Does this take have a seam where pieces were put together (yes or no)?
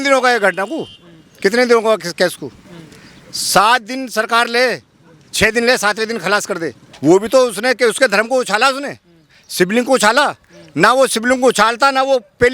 yes